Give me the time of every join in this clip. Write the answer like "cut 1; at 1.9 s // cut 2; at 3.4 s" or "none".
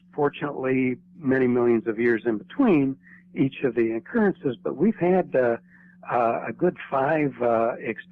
cut 1; at 4.3 s